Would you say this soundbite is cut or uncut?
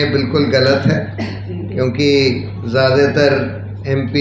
uncut